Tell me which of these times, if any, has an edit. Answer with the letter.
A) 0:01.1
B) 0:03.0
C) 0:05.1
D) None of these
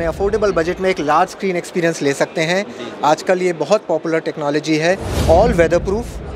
C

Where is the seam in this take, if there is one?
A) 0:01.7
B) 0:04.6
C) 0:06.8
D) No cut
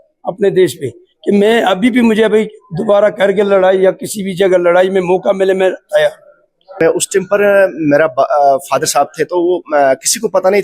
C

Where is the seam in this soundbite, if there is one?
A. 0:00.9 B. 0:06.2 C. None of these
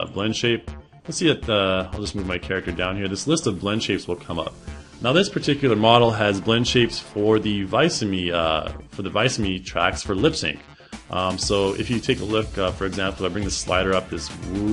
B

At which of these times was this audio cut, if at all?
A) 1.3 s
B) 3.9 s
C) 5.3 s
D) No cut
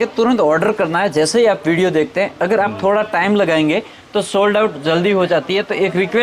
D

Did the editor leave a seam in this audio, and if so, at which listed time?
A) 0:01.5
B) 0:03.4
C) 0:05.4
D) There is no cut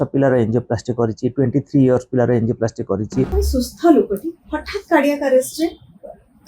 B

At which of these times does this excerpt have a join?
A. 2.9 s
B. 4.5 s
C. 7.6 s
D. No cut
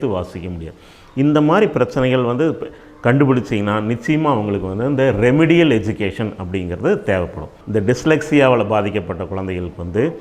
C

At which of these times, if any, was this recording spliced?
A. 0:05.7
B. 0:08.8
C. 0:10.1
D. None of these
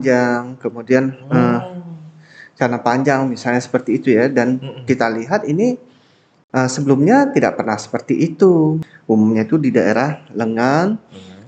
B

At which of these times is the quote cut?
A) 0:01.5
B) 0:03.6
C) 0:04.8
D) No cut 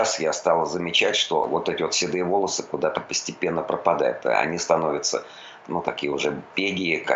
A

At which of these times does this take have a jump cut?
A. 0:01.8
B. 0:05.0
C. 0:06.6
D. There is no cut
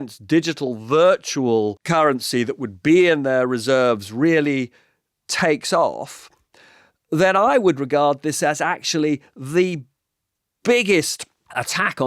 A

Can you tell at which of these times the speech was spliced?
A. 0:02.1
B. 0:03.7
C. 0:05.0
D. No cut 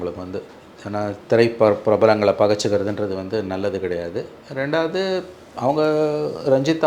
D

